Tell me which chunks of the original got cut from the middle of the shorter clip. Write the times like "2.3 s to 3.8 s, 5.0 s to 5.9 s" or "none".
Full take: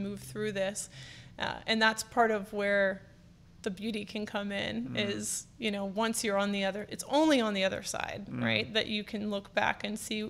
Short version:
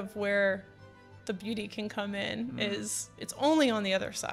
5.5 s to 6.9 s